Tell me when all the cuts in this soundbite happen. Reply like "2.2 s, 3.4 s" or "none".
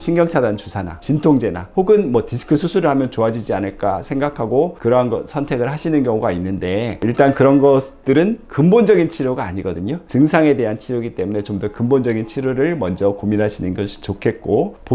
none